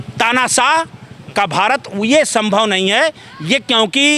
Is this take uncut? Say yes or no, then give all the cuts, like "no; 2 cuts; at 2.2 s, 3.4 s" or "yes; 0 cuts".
yes; 0 cuts